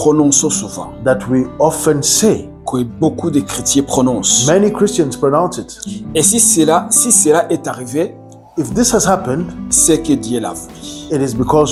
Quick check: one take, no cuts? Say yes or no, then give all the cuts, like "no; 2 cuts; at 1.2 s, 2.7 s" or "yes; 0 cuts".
yes; 0 cuts